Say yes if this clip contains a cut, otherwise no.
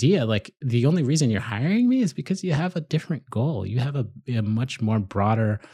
no